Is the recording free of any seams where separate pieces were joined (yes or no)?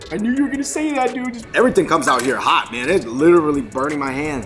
no